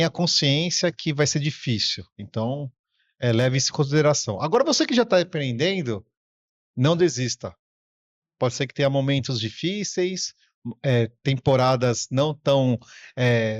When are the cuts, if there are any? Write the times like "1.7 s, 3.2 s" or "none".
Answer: none